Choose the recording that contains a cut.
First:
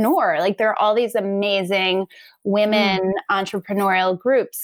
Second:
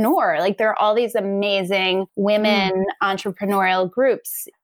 second; 1 cut; at 2.1 s

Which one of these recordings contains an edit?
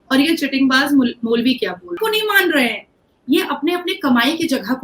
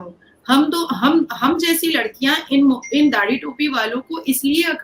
first; 1 cut; at 1.9 s

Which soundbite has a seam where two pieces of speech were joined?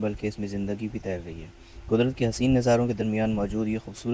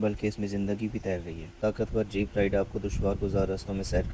second; 1 cut; at 1.6 s

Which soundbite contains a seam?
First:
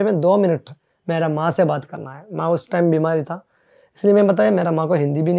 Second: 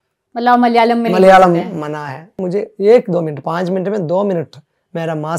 second; 1 cut; at 2.3 s

